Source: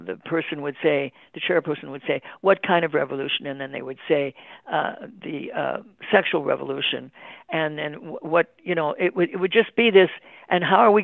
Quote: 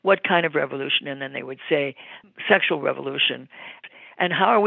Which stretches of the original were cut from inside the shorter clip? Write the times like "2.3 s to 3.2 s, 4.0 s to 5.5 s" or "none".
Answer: 4.6 s to 5.8 s, 7.5 s to 10.2 s